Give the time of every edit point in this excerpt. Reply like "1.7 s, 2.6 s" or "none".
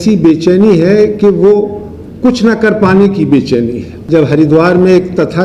3.9 s